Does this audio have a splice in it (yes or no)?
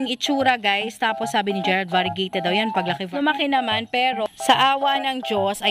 yes